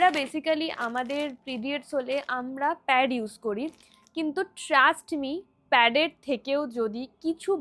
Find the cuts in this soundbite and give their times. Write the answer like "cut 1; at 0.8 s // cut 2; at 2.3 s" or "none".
none

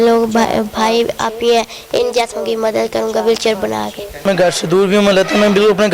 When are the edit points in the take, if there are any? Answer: cut 1; at 4.1 s

